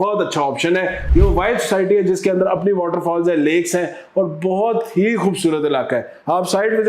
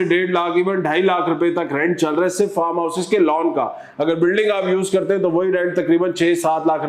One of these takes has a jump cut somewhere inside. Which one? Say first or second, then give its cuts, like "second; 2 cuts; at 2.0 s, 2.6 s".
first; 1 cut; at 1.0 s